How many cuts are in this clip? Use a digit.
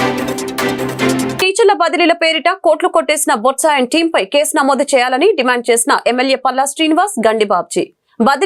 1